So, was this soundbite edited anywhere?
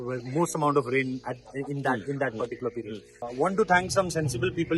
yes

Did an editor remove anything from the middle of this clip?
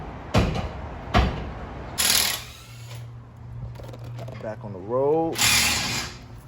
yes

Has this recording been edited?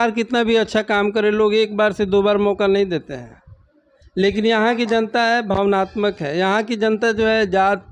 no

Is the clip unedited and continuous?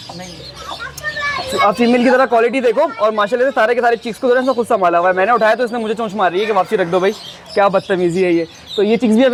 yes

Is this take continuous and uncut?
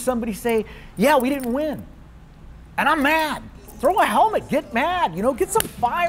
no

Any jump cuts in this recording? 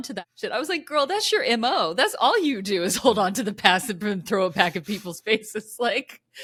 no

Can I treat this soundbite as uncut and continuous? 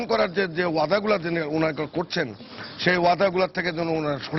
yes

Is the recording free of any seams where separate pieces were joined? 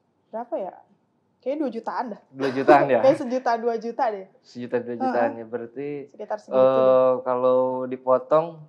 yes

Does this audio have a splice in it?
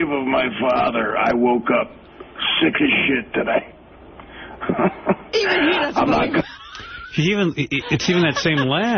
no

